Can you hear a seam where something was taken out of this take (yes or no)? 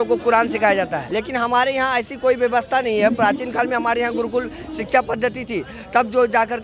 yes